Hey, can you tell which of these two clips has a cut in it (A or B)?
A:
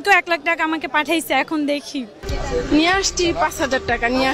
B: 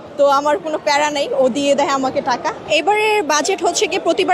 A